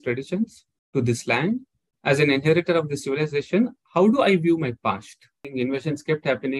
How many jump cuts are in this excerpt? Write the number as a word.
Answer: one